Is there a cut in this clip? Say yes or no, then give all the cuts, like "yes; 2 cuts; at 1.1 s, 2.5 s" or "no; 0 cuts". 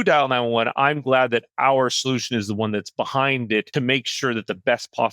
yes; 1 cut; at 3.7 s